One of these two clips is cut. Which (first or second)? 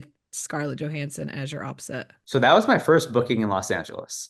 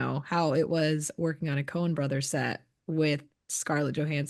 first